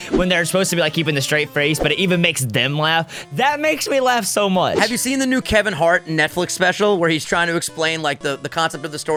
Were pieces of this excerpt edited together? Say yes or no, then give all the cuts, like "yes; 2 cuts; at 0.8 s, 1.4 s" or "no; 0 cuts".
no; 0 cuts